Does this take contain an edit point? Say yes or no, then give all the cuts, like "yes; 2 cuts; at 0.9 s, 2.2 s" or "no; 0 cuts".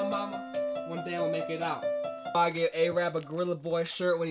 yes; 1 cut; at 2.3 s